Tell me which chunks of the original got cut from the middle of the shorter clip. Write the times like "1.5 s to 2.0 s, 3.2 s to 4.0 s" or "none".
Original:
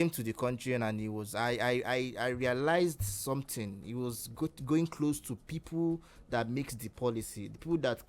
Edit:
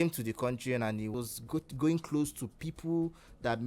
1.1 s to 4.0 s